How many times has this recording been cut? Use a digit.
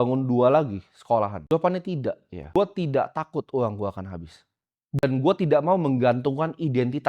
3